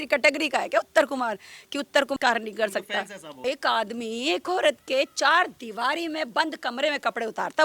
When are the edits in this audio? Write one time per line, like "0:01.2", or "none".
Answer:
0:02.2
0:03.4